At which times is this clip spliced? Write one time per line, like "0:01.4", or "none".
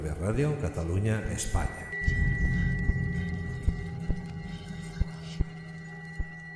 none